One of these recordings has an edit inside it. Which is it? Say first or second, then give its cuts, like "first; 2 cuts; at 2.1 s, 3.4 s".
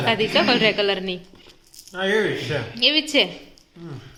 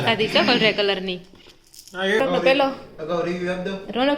second; 1 cut; at 2.2 s